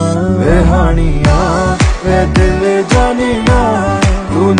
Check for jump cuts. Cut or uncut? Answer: uncut